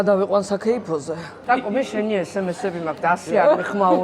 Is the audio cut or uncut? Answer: cut